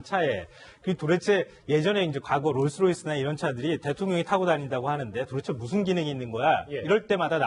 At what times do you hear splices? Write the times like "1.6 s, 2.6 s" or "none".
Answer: none